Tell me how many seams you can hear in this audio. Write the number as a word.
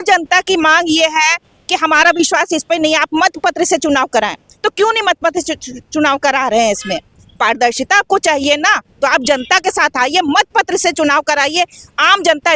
zero